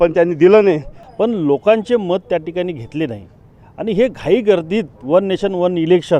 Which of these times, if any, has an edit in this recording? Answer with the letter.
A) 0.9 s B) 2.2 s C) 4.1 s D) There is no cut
A